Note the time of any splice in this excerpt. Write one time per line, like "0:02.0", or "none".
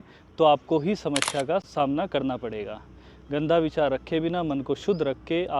0:01.7